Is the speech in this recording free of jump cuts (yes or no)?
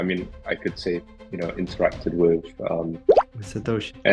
yes